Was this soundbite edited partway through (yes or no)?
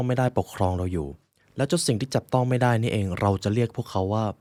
no